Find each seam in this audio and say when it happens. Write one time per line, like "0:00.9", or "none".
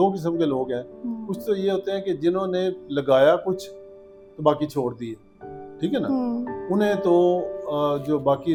none